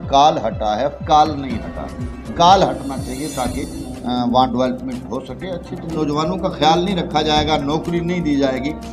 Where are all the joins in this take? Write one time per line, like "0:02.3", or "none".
0:02.3
0:05.9